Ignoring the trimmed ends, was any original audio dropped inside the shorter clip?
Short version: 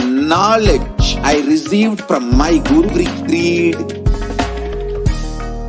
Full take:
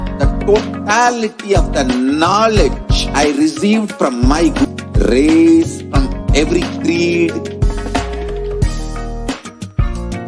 yes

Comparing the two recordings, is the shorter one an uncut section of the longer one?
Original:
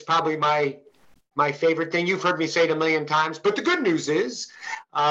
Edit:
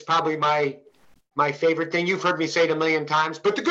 yes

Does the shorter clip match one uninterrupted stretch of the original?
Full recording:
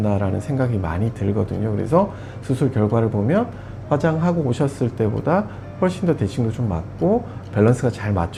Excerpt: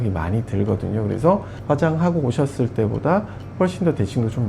no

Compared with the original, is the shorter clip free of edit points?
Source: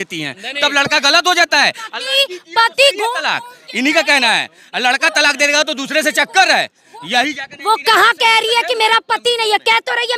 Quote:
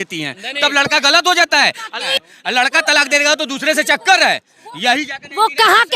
no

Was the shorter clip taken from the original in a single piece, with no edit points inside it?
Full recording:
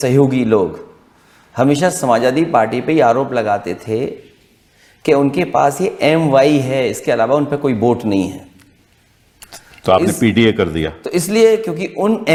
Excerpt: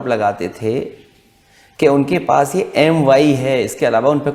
yes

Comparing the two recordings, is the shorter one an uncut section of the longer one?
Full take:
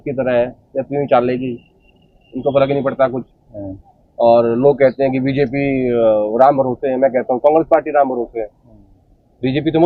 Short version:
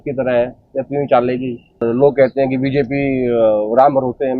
no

